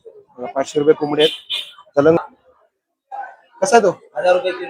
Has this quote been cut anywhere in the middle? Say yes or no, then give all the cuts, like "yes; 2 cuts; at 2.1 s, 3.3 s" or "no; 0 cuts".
yes; 1 cut; at 2.2 s